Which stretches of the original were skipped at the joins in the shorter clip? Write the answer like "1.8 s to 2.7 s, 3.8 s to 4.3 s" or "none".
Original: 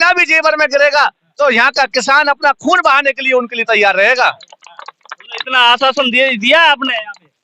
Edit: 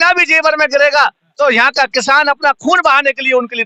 none